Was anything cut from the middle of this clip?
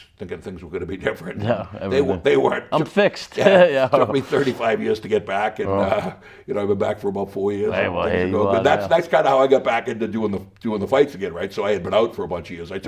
no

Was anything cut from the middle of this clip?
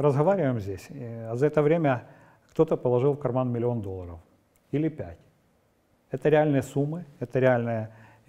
no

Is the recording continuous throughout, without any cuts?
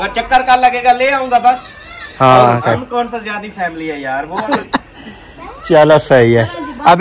no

